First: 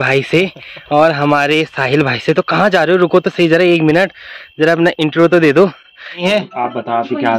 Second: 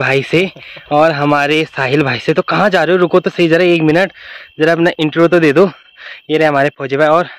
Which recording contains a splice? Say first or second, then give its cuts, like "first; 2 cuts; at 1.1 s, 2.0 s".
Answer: first; 1 cut; at 6.2 s